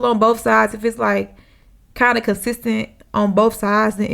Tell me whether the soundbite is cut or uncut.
uncut